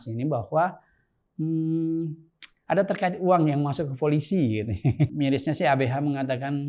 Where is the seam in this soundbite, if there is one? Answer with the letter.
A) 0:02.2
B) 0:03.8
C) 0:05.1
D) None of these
C